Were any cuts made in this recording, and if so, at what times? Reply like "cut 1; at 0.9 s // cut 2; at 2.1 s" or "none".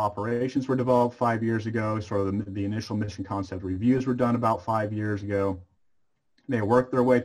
none